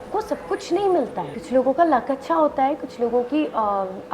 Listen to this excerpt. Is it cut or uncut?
cut